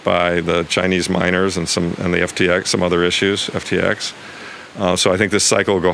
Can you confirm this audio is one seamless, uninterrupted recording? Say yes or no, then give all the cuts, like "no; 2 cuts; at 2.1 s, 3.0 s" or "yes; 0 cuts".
yes; 0 cuts